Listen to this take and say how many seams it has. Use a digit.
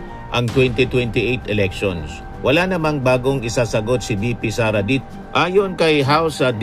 1